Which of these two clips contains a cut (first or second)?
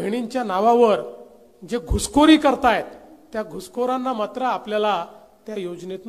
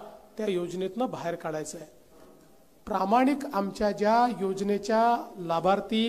second